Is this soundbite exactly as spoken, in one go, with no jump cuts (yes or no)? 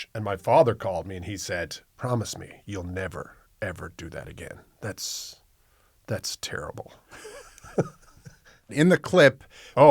no